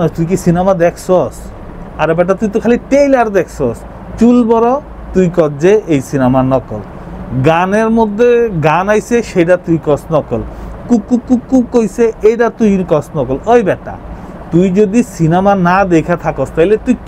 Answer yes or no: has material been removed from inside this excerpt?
no